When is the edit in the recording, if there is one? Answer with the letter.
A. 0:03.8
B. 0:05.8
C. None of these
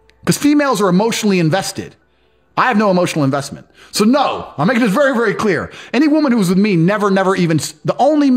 C